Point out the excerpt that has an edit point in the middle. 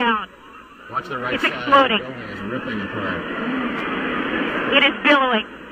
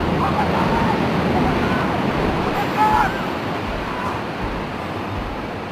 first; 1 cut; at 3.4 s

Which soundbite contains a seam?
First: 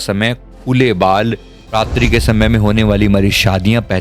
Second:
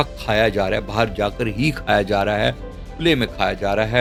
first; 1 cut; at 1.5 s

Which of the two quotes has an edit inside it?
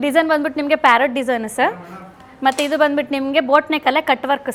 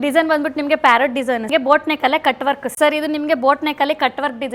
second; 2 cuts; at 1.5 s, 2.7 s

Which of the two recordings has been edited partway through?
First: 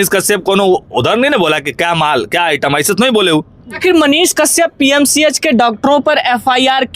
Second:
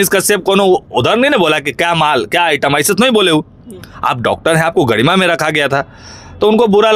first; 1 cut; at 3.6 s

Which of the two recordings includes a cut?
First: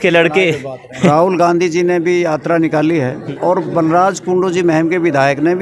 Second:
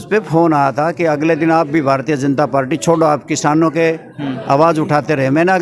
first; 2 cuts; at 1.1 s, 3.2 s

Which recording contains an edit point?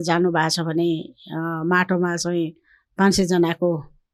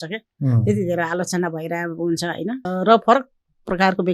second; 1 cut; at 2.7 s

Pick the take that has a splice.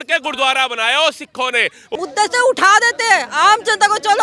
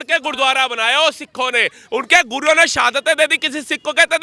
first; 1 cut; at 1.8 s

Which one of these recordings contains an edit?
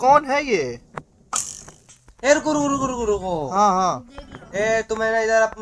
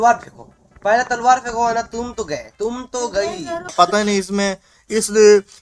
second; 1 cut; at 3.7 s

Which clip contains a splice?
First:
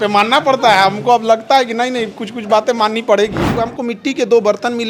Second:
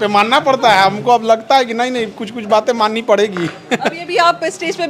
first; 1 cut; at 3.6 s

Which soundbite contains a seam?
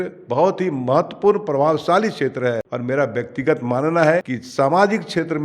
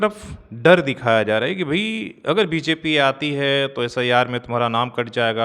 first; 2 cuts; at 2.7 s, 4.4 s

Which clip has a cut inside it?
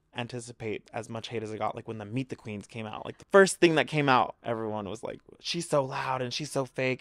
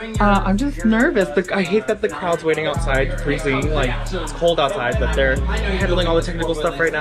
first; 2 cuts; at 3.2 s, 4.4 s

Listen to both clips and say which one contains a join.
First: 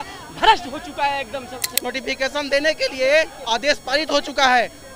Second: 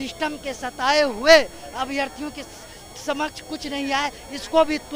first; 1 cut; at 1.6 s

